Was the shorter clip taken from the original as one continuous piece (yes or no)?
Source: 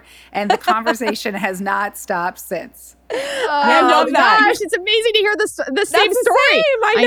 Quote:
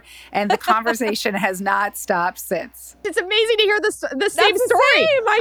no